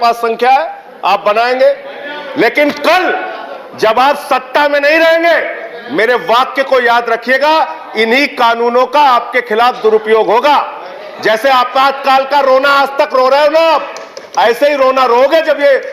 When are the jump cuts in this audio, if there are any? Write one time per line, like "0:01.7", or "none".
none